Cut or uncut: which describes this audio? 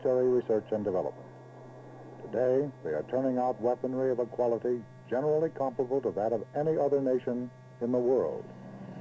cut